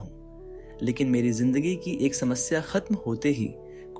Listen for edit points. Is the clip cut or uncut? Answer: cut